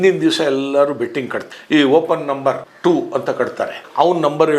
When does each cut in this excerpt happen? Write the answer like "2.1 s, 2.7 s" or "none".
2.7 s

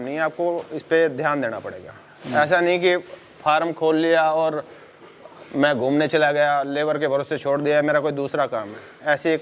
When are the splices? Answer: none

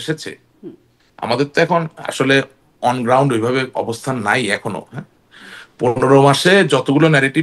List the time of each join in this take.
none

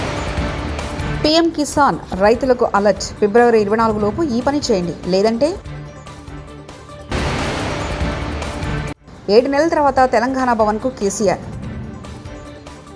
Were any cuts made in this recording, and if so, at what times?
1.0 s

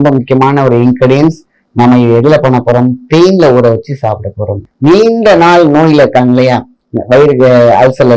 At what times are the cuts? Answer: 4.6 s

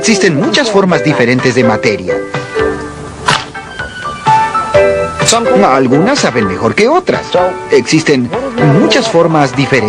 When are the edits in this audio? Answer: 2.3 s

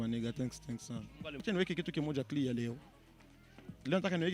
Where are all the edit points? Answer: 1.4 s

